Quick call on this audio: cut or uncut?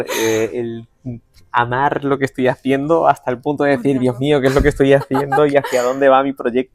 uncut